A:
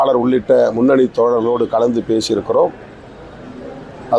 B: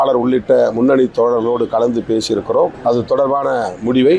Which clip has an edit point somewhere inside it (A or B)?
B